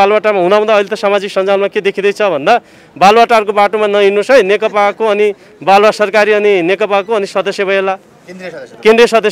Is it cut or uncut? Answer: uncut